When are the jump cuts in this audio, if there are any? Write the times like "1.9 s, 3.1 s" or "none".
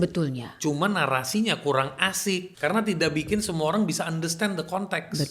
2.5 s